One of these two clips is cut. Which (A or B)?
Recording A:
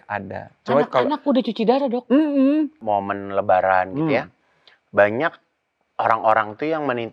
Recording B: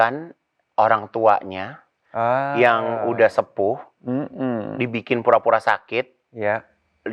A